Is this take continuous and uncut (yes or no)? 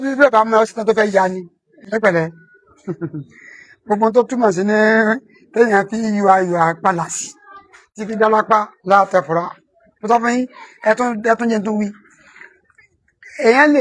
no